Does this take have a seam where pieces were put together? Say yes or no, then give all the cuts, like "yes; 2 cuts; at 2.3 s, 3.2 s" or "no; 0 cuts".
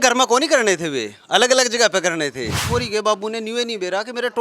yes; 1 cut; at 2.6 s